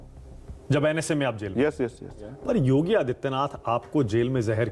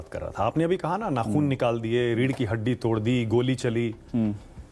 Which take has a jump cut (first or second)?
first